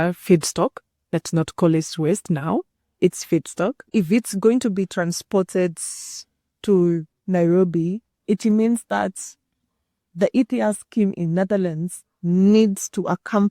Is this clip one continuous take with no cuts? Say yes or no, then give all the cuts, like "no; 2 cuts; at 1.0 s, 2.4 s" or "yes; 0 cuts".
no; 1 cut; at 3.8 s